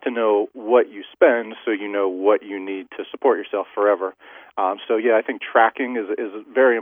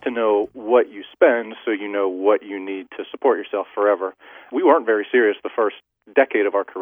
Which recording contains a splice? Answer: second; 1 cut; at 4.4 s

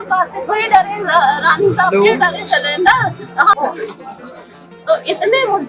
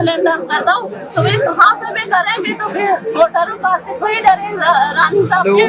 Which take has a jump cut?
first; 1 cut; at 3.5 s

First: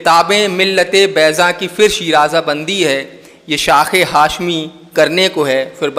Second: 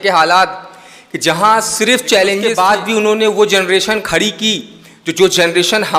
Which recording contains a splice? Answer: second; 1 cut; at 2.5 s

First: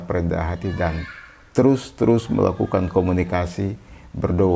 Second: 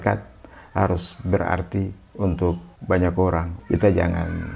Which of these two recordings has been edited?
second; 2 cuts; at 2.7 s, 3.5 s

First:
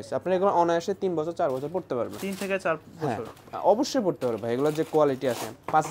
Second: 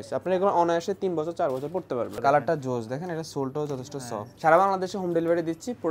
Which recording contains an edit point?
second; 2 cuts; at 2.1 s, 4.2 s

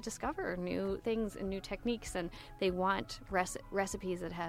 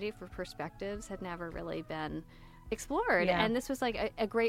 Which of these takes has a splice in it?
second; 1 cut; at 2.7 s

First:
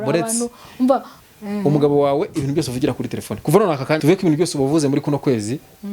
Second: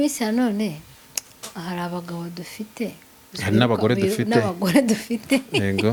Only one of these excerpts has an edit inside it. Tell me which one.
first; 2 cuts; at 1.2 s, 4.0 s

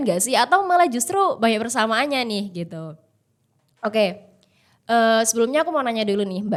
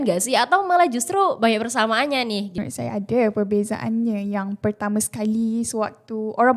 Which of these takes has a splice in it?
second; 1 cut; at 2.5 s

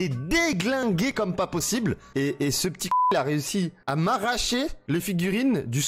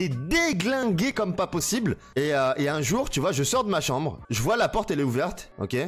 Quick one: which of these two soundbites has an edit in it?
first; 1 cut; at 2.1 s

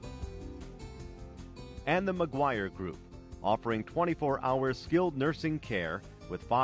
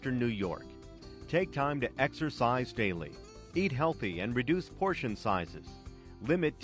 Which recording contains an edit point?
first; 1 cut; at 1.8 s

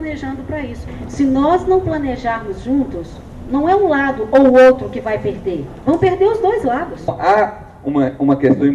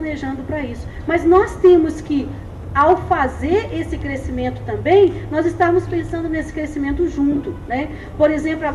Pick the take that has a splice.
first; 2 cuts; at 0.9 s, 7.1 s

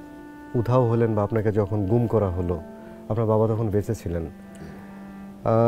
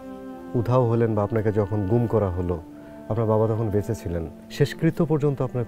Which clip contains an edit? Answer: second; 1 cut; at 4.4 s

